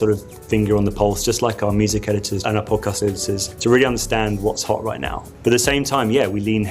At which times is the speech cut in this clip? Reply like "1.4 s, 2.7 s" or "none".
2.4 s, 3.5 s, 5.2 s